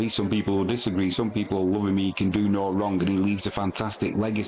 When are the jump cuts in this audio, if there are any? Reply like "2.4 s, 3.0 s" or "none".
none